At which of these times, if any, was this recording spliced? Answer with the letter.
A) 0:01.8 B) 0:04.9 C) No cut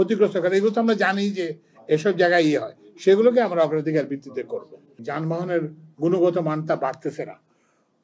B